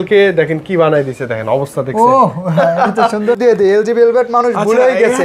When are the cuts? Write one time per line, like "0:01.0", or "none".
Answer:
0:03.3